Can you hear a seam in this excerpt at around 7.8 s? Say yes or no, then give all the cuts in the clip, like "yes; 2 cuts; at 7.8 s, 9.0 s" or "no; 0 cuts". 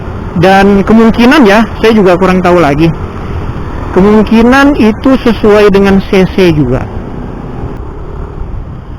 yes; 1 cut; at 7.8 s